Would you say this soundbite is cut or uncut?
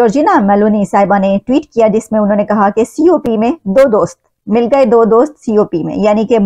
uncut